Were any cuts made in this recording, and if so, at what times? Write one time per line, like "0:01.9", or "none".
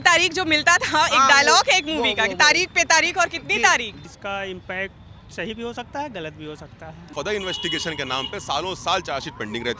0:04.0
0:07.0